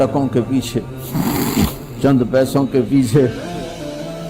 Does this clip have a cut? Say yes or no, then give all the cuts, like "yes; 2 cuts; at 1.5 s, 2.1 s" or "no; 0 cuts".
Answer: yes; 1 cut; at 3.4 s